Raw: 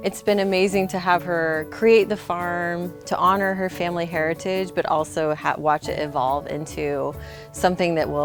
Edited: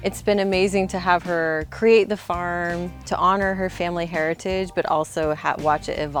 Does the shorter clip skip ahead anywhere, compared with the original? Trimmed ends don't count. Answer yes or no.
no